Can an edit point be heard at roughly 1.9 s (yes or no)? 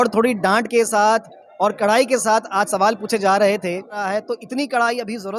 no